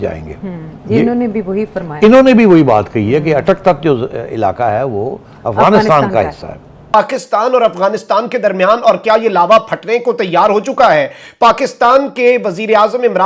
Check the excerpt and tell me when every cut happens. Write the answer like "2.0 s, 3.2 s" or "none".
6.9 s